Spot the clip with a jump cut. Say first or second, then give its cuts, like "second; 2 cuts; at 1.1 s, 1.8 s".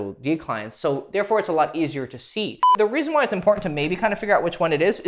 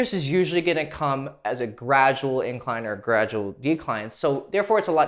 first; 1 cut; at 2.6 s